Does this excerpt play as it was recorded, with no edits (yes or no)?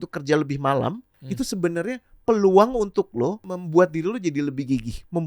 no